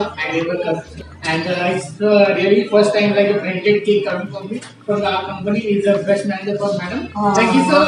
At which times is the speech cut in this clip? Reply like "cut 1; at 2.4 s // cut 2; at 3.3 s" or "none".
cut 1; at 0.9 s